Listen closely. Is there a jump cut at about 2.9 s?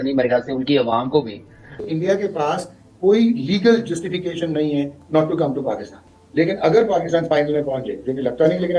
no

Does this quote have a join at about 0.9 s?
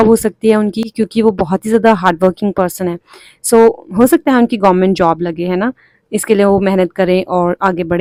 no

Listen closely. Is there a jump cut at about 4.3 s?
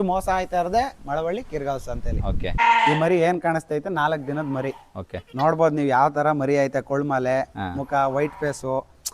no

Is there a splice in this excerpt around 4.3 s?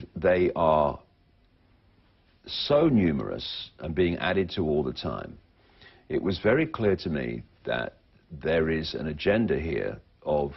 yes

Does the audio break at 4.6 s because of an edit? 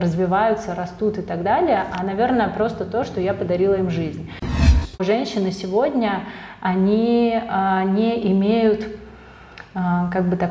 yes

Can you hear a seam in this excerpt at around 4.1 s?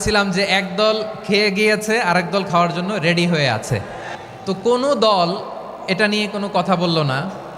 yes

